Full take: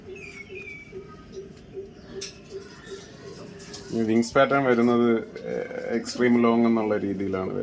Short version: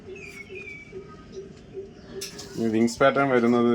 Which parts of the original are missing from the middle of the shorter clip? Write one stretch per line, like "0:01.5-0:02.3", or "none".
0:02.3-0:03.7